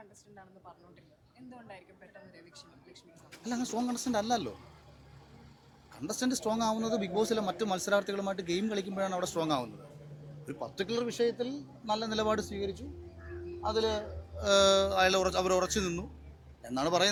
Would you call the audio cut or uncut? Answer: uncut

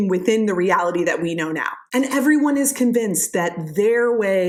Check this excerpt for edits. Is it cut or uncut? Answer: uncut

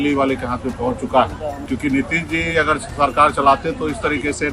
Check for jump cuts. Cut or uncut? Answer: cut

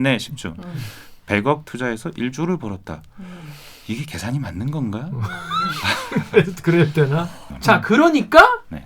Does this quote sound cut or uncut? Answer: cut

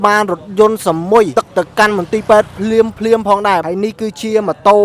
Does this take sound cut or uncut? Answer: cut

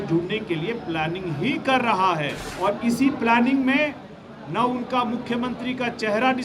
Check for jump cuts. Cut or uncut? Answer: cut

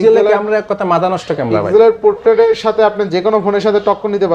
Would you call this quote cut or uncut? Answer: uncut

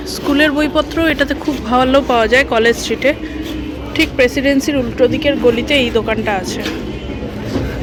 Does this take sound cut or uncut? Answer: uncut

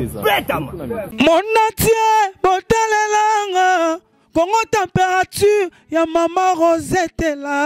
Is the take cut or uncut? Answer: cut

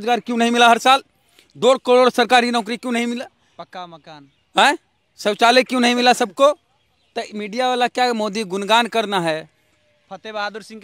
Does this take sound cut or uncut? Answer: uncut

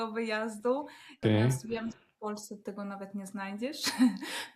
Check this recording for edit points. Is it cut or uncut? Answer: cut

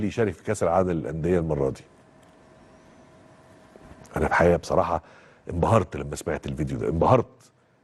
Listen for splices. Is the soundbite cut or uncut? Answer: uncut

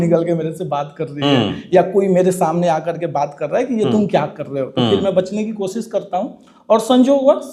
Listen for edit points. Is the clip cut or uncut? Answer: uncut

